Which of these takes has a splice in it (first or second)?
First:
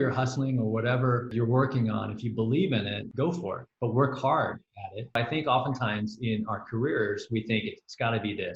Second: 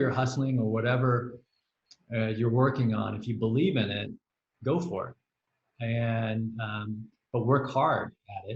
first